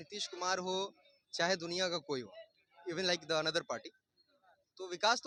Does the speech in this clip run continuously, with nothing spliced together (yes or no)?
yes